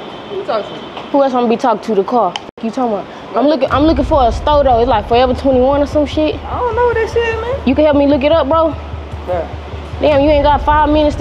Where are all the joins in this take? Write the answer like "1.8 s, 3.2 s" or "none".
none

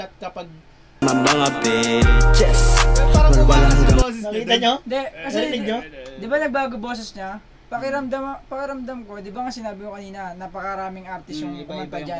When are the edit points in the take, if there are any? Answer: 1.0 s

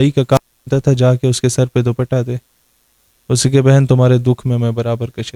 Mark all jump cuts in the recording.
none

